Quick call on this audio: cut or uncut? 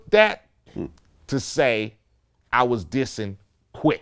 uncut